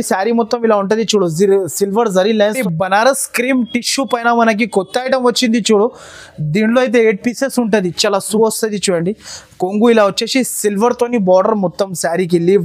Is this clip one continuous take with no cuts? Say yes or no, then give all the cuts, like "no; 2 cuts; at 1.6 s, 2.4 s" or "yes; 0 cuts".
no; 2 cuts; at 2.6 s, 8.4 s